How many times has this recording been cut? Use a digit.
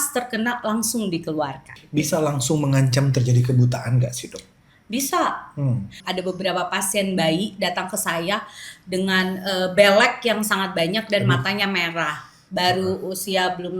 2